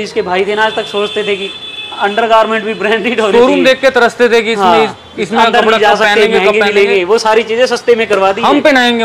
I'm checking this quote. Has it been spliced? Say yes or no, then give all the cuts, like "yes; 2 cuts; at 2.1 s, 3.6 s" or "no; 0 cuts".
no; 0 cuts